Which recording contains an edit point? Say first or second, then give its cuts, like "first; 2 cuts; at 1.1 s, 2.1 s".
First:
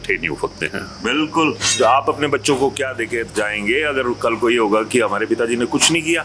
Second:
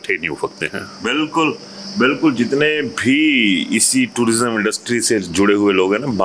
first; 1 cut; at 1.7 s